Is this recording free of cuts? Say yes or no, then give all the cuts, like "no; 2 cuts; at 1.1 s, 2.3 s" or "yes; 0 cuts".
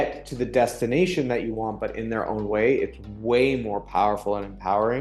yes; 0 cuts